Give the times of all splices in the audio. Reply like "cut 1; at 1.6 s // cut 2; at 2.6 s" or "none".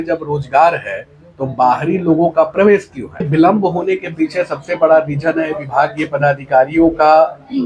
cut 1; at 3.3 s